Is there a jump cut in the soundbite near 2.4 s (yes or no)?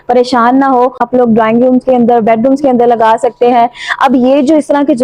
no